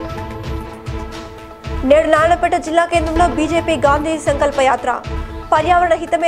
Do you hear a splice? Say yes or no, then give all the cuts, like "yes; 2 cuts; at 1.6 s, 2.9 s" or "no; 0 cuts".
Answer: yes; 1 cut; at 1.3 s